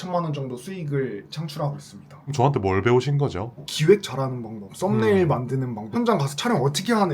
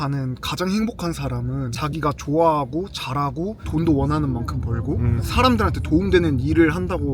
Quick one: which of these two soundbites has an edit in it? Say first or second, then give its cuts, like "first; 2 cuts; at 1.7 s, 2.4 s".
first; 3 cuts; at 2.3 s, 3.7 s, 5.8 s